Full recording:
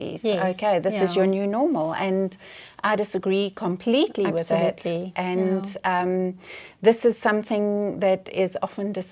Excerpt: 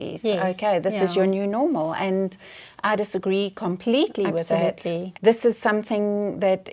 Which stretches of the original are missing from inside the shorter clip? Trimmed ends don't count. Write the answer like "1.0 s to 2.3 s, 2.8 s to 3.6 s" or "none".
5.1 s to 6.7 s